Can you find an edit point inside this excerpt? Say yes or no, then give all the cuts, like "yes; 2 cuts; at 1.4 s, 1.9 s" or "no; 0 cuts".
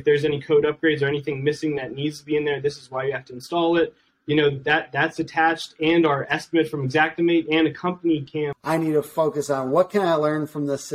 yes; 1 cut; at 8.6 s